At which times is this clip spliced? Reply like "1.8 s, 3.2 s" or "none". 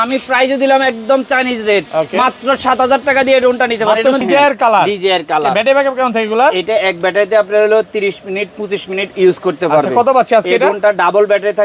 4.2 s